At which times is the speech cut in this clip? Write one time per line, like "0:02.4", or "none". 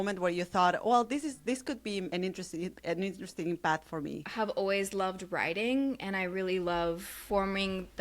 0:02.1
0:04.2
0:07.1